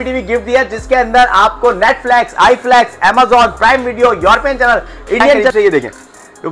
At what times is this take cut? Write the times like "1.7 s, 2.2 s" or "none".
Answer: 5.5 s